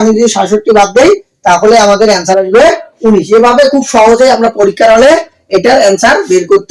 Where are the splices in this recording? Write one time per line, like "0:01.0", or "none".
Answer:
none